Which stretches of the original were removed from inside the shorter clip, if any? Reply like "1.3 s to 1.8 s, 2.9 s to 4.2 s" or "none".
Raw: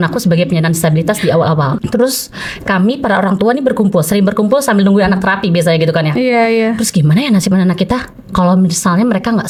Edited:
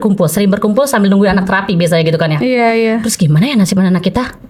none